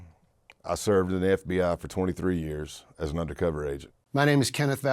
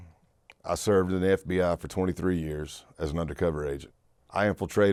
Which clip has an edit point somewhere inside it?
first; 1 cut; at 3.9 s

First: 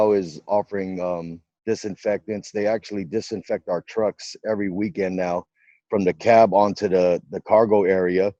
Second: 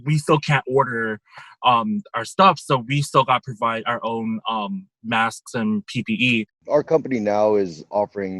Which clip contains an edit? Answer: second; 1 cut; at 6.5 s

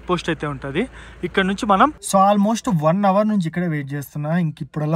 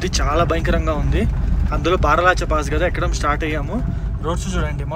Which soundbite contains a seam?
first; 1 cut; at 1.9 s

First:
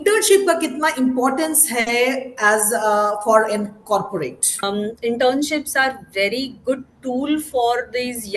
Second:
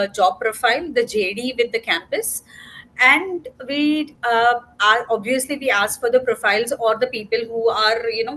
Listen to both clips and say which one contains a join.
first; 1 cut; at 4.6 s

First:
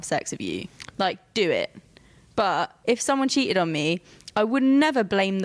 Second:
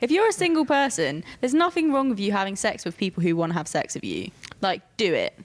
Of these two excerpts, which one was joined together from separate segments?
first; 1 cut; at 2.7 s

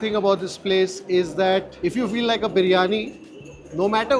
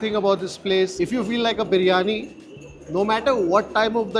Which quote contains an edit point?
second; 1 cut; at 0.9 s

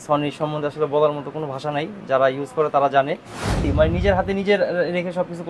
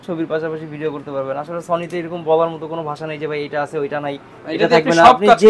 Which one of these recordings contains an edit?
first; 1 cut; at 3.6 s

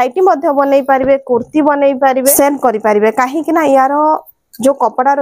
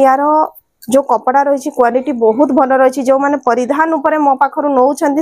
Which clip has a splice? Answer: first; 1 cut; at 2.3 s

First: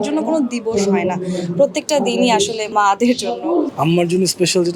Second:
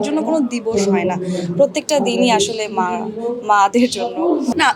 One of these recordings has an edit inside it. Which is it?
first; 2 cuts; at 2.7 s, 3.7 s

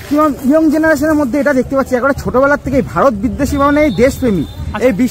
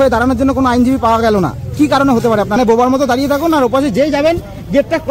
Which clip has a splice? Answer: second; 1 cut; at 2.6 s

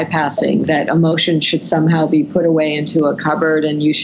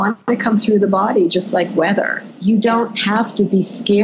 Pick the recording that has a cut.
second; 1 cut; at 2.2 s

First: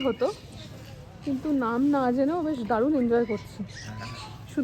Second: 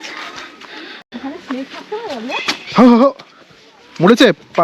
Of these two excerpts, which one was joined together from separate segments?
second; 1 cut; at 1.0 s

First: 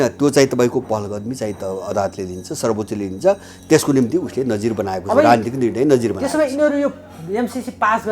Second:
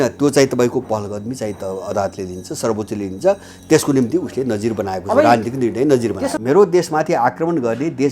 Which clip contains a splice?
second; 1 cut; at 6.3 s

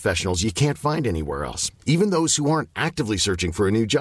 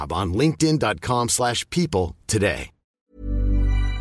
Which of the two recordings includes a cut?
second; 1 cut; at 3.1 s

